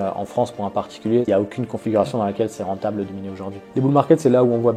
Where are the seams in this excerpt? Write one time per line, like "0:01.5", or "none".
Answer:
0:01.3
0:03.6